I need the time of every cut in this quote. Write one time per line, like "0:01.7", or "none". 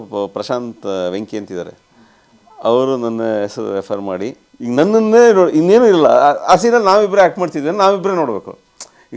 0:04.4